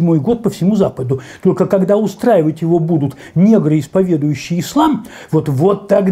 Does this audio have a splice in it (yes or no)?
no